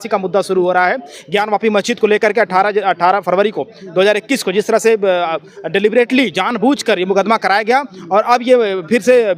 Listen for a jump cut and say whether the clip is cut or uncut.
uncut